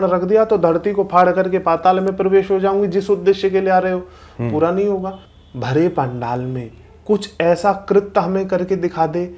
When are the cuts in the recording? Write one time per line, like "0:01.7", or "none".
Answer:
0:05.2